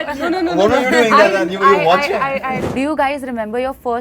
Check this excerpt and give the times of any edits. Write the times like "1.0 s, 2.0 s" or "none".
2.6 s